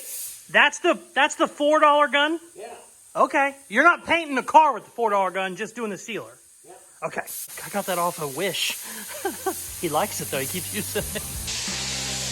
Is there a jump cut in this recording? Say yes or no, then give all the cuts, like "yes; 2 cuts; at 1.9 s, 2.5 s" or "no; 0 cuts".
yes; 1 cut; at 7.6 s